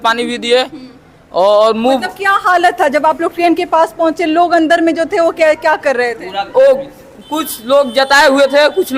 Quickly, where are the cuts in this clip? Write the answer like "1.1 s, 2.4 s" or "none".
none

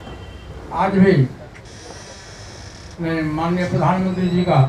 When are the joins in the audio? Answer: none

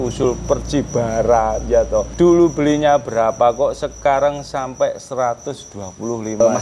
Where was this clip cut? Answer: 2.1 s

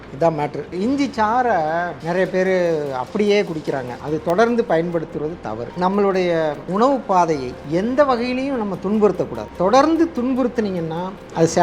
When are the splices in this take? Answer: 2.0 s, 3.9 s, 6.6 s, 7.5 s

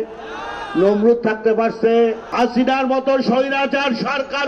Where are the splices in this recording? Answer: 2.2 s

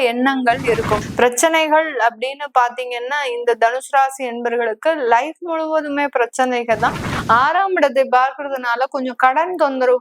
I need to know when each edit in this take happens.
1.1 s, 7.1 s

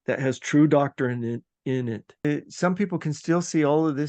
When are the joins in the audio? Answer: 2.2 s

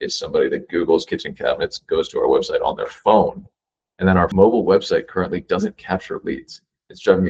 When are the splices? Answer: 4.3 s

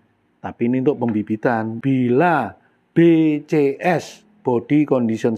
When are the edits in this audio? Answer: 1.7 s

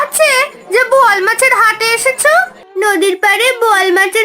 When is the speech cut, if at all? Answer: 2.6 s

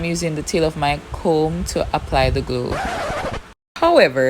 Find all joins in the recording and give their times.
3.1 s

